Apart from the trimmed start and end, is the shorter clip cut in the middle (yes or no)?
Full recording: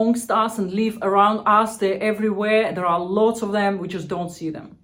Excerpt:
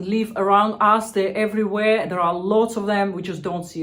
no